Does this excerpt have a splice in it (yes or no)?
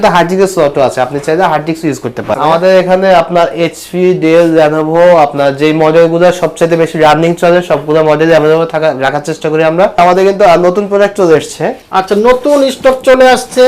yes